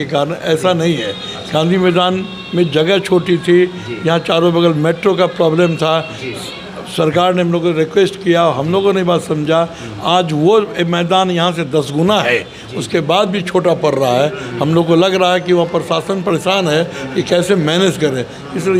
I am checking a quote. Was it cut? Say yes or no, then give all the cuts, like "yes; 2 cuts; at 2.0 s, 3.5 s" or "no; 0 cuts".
no; 0 cuts